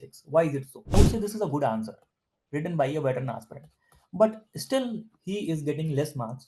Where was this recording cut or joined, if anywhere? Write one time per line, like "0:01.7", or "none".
0:00.9

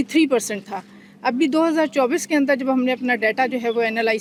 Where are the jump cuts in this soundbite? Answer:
none

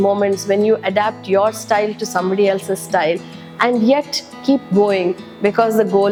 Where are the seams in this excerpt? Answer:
none

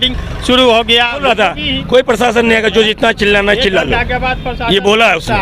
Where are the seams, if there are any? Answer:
0:01.2

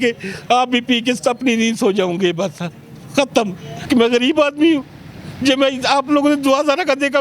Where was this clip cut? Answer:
0:03.7

